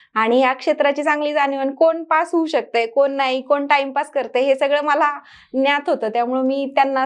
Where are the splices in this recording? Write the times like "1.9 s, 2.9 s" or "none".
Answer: none